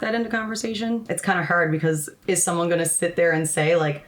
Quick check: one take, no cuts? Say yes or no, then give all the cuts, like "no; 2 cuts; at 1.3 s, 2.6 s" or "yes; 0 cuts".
no; 2 cuts; at 1.0 s, 2.1 s